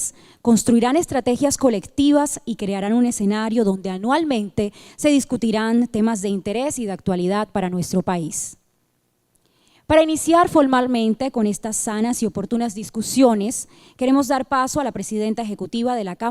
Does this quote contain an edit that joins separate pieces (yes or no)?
yes